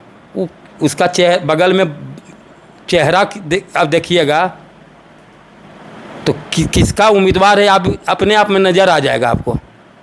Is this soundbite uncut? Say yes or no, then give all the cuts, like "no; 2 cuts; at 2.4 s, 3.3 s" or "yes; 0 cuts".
yes; 0 cuts